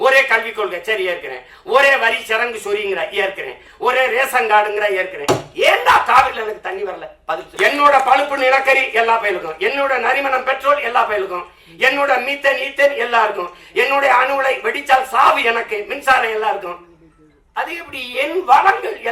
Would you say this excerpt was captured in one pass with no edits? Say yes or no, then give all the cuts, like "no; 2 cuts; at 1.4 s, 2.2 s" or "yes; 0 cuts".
no; 1 cut; at 7.4 s